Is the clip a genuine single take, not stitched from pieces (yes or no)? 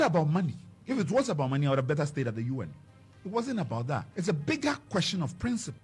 no